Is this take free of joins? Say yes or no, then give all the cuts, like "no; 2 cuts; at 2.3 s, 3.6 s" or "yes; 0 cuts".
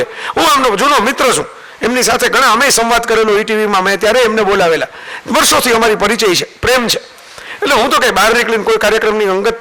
yes; 0 cuts